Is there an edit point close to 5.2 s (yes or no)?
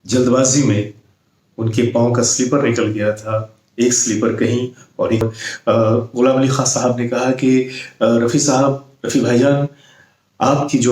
yes